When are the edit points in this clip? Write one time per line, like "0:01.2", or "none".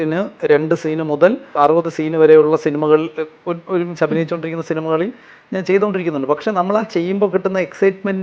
0:01.6